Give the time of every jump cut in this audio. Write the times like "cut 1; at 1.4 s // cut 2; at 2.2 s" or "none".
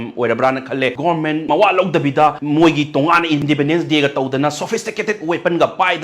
cut 1; at 1.1 s // cut 2; at 2.4 s // cut 3; at 3.4 s